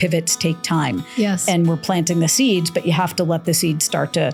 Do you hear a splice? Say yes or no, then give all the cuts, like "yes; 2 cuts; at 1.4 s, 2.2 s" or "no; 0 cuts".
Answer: no; 0 cuts